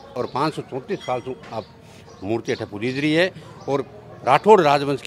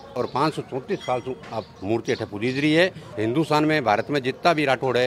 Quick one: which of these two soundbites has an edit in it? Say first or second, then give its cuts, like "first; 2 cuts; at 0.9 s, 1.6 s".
second; 2 cuts; at 1.7 s, 3.1 s